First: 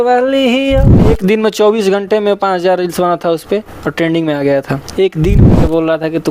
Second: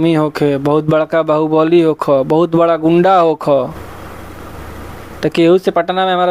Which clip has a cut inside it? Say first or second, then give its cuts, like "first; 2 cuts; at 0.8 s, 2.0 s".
first; 2 cuts; at 1.2 s, 5.5 s